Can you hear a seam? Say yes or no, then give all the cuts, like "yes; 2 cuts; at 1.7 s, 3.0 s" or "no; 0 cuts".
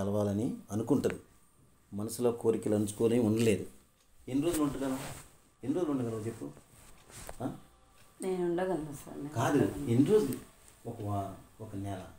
no; 0 cuts